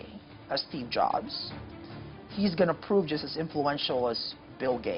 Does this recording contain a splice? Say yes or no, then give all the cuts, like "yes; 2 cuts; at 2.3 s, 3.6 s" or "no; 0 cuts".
no; 0 cuts